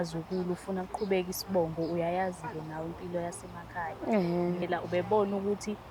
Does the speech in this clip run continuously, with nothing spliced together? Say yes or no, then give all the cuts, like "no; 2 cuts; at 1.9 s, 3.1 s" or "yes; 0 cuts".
no; 1 cut; at 4.6 s